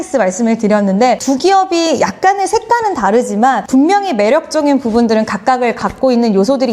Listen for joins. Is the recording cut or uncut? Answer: cut